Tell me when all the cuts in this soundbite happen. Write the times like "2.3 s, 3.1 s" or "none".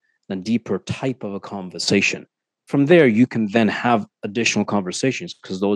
none